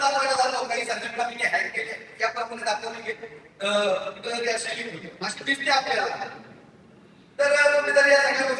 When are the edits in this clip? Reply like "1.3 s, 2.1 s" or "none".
none